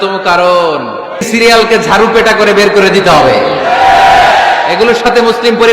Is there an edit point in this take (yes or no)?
yes